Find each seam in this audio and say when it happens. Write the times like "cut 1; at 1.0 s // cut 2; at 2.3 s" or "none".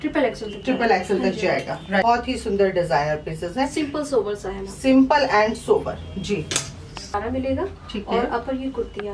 cut 1; at 2.0 s // cut 2; at 7.1 s

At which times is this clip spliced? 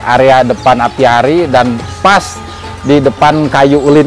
none

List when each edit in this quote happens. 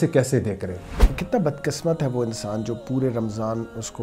cut 1; at 1.0 s

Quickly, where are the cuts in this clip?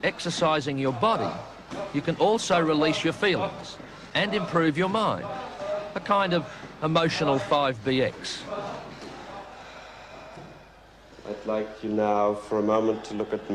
none

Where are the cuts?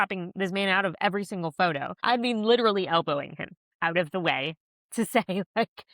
cut 1; at 2.0 s

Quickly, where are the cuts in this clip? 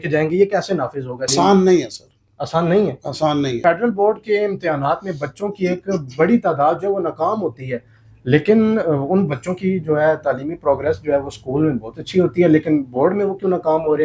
cut 1; at 1.3 s // cut 2; at 3.6 s

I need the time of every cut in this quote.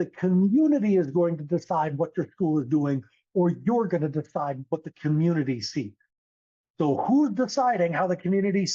none

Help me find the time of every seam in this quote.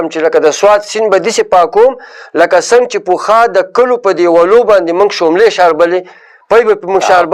none

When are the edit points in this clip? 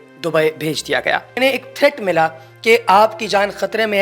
cut 1; at 1.4 s

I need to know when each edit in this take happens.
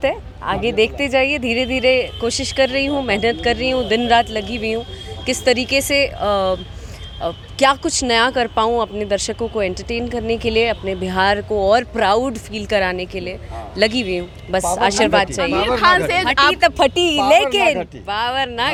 none

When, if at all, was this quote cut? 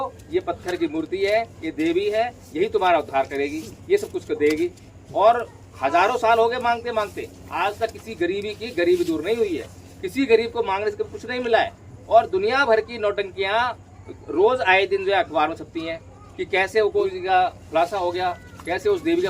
cut 1; at 17.1 s

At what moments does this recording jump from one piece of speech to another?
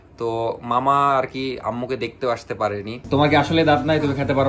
cut 1; at 3.1 s

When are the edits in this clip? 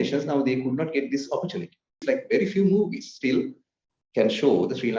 cut 1; at 2.0 s

